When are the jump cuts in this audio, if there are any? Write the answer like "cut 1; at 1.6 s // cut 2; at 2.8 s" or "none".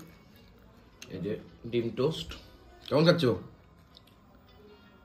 none